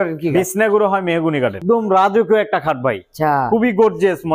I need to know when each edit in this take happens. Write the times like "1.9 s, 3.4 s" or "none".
1.6 s